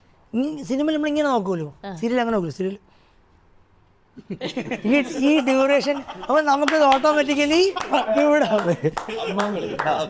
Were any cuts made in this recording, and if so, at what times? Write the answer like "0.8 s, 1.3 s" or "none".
none